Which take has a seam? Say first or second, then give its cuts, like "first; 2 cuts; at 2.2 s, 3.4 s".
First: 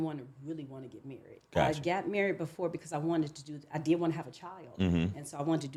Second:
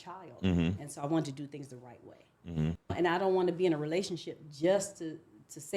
second; 1 cut; at 2.8 s